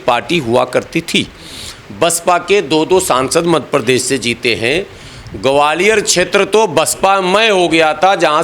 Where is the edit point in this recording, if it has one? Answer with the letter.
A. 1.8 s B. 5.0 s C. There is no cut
C